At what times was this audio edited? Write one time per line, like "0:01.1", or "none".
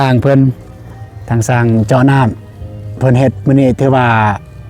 none